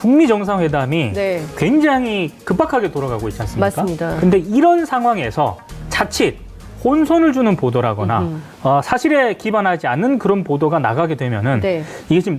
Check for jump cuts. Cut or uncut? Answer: cut